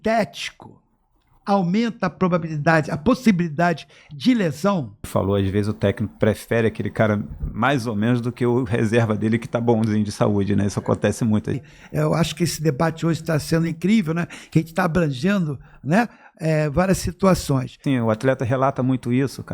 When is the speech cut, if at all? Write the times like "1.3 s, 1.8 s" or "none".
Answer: 5.1 s, 11.6 s, 17.8 s

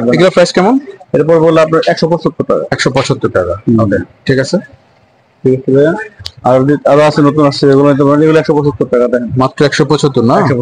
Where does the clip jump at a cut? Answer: none

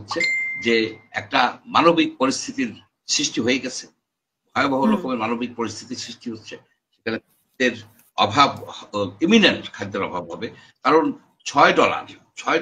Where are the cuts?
none

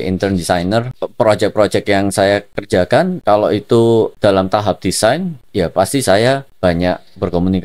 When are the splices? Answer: 1.0 s, 2.7 s, 4.1 s, 5.4 s, 6.5 s

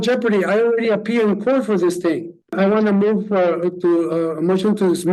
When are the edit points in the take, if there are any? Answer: 2.5 s

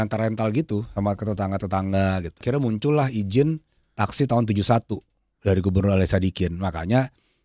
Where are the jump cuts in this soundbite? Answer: 2.4 s

